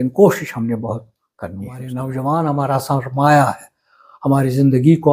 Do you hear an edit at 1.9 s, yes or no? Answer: yes